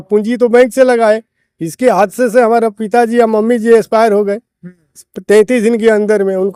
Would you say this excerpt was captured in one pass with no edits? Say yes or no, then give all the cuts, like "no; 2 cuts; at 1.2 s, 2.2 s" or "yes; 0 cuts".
yes; 0 cuts